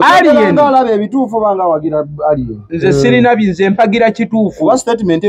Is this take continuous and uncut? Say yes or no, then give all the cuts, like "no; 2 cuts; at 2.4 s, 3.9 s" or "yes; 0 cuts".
yes; 0 cuts